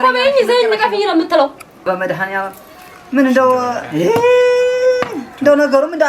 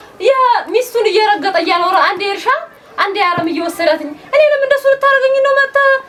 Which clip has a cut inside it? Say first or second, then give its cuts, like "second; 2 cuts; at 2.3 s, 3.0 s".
first; 1 cut; at 1.9 s